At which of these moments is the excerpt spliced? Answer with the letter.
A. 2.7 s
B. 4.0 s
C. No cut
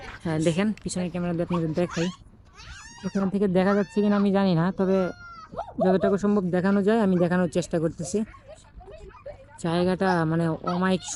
C